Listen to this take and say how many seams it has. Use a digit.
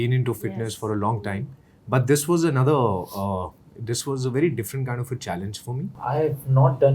1